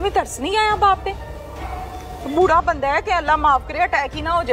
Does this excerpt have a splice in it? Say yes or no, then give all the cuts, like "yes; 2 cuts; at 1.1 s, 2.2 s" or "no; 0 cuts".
no; 0 cuts